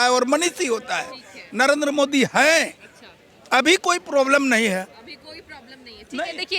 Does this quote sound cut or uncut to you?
uncut